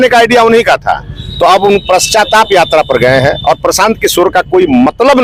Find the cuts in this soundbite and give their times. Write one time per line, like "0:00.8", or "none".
none